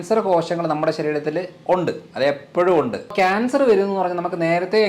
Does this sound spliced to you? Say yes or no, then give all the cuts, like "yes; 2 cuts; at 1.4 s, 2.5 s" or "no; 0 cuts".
yes; 1 cut; at 3.1 s